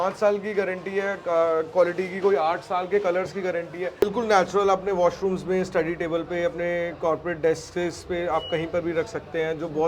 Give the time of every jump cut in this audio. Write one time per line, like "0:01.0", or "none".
0:04.0